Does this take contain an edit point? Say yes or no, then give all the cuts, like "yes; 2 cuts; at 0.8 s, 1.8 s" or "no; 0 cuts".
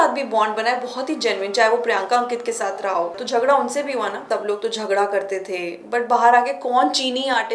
yes; 2 cuts; at 3.2 s, 4.3 s